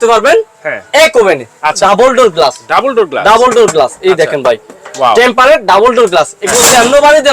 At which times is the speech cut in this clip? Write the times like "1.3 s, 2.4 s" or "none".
1.8 s

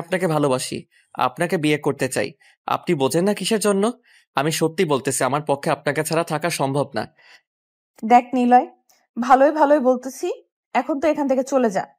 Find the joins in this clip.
none

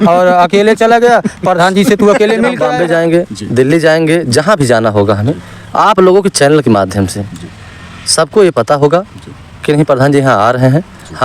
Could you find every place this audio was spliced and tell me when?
2.6 s

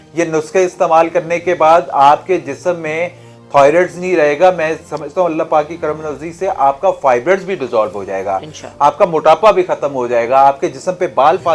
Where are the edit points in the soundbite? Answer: none

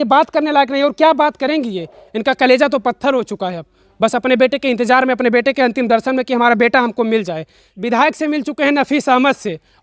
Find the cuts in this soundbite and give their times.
7.7 s

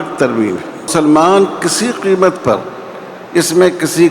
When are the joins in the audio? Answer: 0.9 s

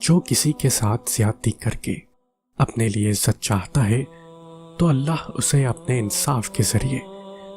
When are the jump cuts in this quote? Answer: none

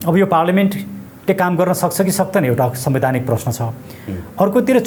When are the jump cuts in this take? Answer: none

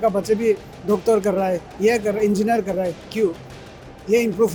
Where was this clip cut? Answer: none

